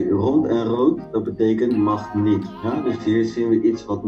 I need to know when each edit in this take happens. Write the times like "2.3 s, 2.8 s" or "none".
none